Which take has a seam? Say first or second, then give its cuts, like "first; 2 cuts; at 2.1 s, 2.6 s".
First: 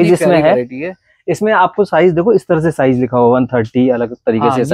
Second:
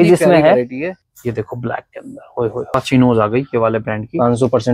second; 2 cuts; at 1.1 s, 2.7 s